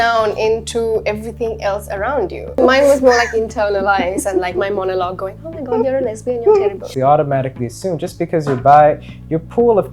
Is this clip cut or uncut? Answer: cut